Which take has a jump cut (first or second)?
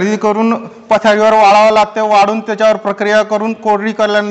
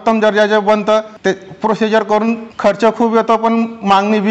second